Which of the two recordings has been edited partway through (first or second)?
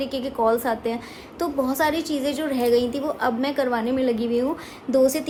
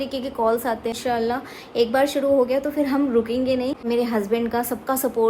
second